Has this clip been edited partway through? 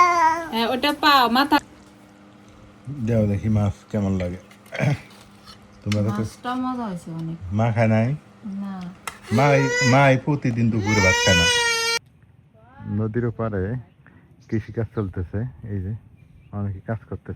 yes; 2 cuts; at 1.6 s, 12.0 s

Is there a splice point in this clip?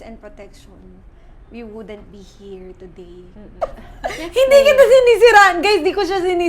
yes; 1 cut; at 3.6 s

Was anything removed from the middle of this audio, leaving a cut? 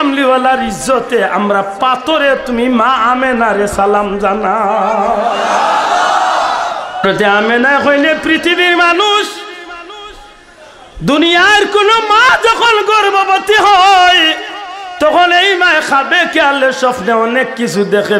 yes; 1 cut; at 7.0 s

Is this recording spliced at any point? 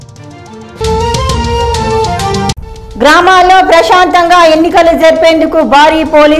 yes; 1 cut; at 2.5 s

